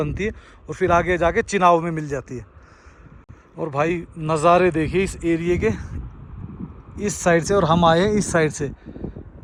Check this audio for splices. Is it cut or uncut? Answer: uncut